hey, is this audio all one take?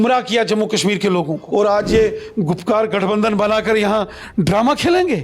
no; 1 cut; at 1.4 s

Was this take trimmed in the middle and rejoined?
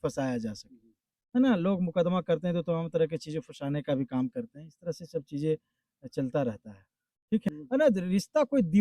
yes; 1 cut; at 7.5 s

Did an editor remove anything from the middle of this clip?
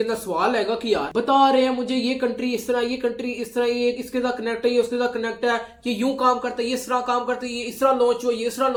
no; 0 cuts

